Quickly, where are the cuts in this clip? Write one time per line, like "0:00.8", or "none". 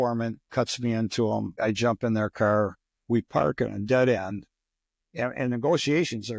0:01.5
0:02.8